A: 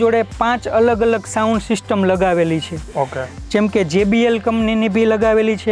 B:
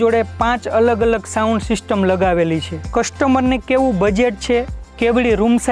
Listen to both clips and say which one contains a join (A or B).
B